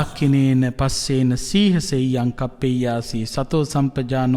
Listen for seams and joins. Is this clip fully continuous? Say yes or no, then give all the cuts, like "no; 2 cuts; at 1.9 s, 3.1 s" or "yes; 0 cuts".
yes; 0 cuts